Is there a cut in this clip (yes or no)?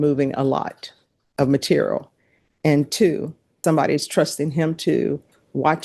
yes